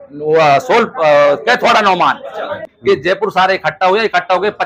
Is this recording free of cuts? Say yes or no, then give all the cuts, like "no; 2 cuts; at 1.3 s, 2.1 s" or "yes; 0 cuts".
no; 1 cut; at 2.7 s